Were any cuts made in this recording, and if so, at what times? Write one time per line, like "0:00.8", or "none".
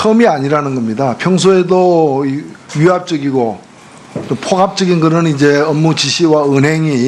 0:02.5